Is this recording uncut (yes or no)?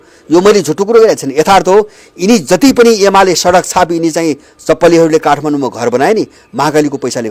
yes